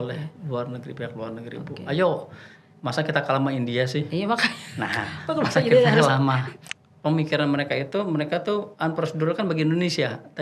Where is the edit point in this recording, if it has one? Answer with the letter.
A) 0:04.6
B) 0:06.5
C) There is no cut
B